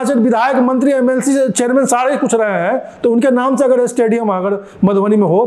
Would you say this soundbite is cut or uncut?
uncut